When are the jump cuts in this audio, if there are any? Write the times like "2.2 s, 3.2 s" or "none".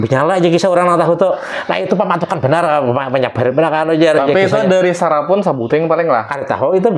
none

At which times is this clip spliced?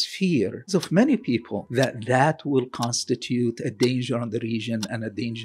1.6 s

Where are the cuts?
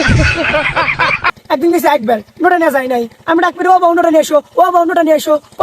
1.3 s

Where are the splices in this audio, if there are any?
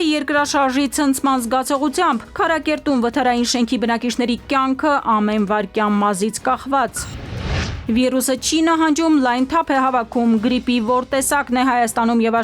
7.7 s

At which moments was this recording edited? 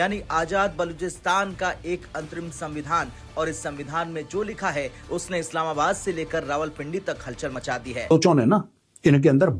8.1 s

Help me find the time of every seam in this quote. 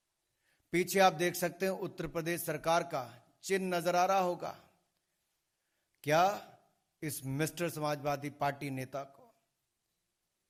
none

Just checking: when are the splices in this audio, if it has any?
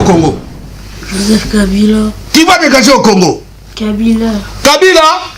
none

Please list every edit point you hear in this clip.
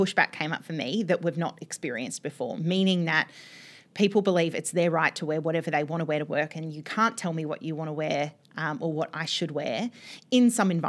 none

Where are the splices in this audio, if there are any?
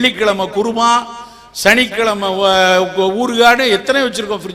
none

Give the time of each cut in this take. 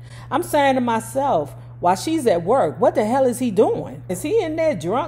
4.2 s

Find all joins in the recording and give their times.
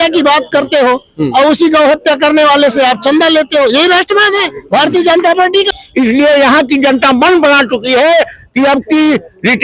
5.8 s

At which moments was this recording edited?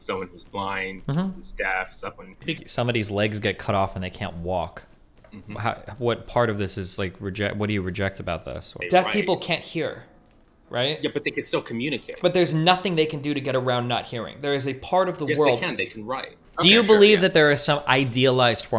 2.6 s, 8.7 s, 16.4 s

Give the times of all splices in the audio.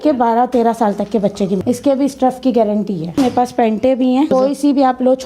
1.6 s, 3.2 s, 4.3 s

